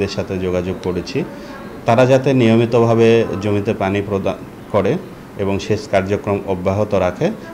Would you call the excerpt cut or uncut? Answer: uncut